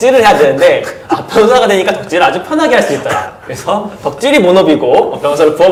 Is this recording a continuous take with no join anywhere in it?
yes; 0 cuts

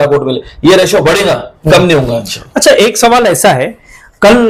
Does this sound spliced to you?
no; 0 cuts

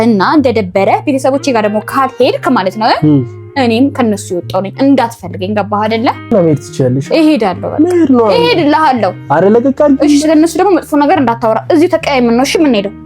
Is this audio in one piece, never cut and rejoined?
no; 1 cut; at 6.3 s

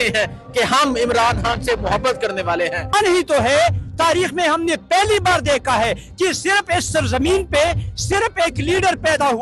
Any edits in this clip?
yes; 1 cut; at 2.9 s

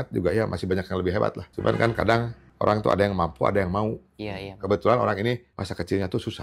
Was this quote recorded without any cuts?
no; 3 cuts; at 1.5 s, 2.4 s, 5.5 s

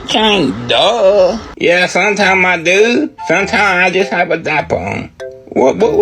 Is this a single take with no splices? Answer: no; 1 cut; at 1.5 s

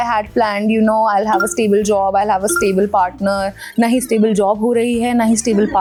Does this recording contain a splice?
no; 0 cuts

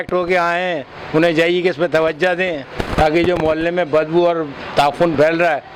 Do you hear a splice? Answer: no; 0 cuts

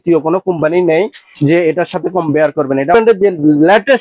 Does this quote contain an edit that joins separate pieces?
yes; 1 cut; at 2.9 s

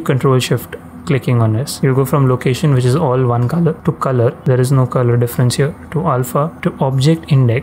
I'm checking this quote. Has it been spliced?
yes; 2 cuts; at 4.2 s, 6.5 s

